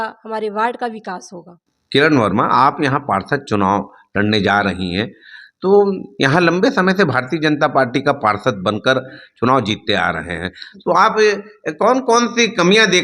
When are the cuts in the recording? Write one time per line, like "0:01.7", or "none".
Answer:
0:01.7